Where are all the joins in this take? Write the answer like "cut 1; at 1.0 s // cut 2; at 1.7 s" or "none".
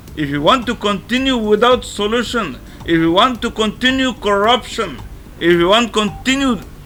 none